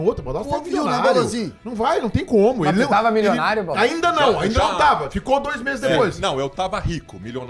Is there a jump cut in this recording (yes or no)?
no